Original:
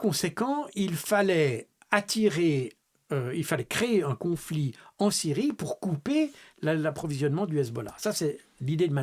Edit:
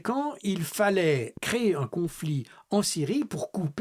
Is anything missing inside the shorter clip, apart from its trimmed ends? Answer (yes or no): yes